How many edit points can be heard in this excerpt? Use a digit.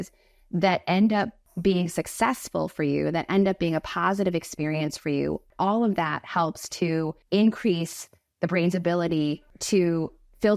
4